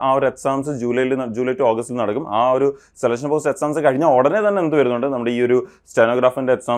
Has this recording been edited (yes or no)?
no